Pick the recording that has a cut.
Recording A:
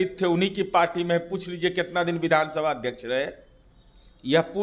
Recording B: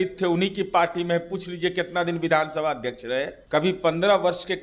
B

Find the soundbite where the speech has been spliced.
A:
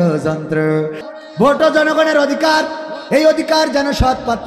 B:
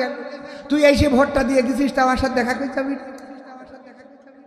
A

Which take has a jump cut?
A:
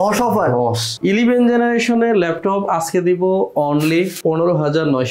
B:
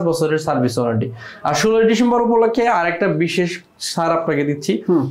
A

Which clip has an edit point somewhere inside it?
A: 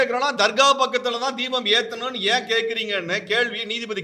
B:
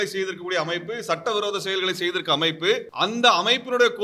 B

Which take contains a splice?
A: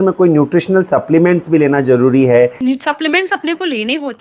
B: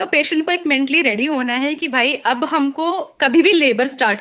A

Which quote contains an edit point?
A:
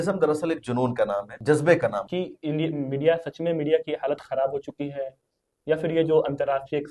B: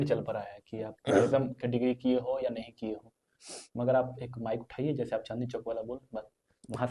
A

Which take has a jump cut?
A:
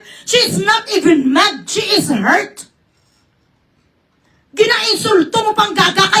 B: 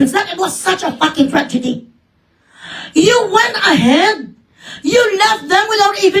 A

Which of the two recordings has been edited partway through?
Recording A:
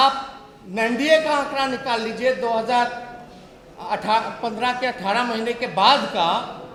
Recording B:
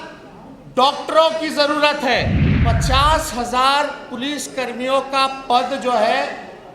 B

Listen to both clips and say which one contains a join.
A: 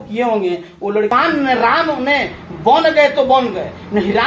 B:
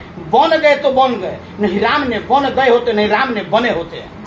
A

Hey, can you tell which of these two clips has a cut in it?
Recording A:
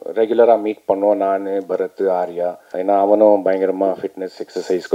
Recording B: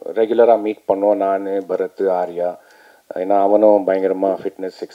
A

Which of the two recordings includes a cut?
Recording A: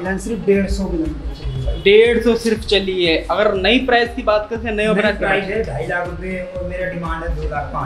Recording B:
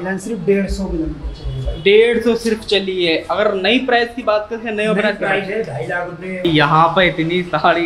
B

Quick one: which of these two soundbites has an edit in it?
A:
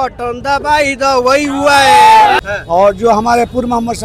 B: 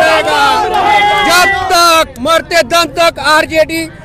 A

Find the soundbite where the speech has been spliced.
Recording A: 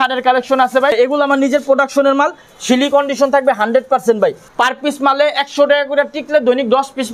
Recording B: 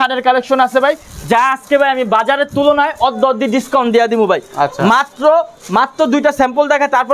A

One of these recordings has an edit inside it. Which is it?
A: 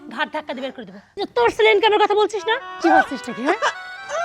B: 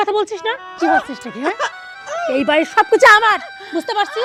A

